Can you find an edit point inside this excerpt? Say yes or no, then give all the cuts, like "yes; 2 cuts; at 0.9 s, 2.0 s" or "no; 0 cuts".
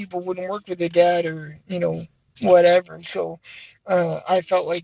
no; 0 cuts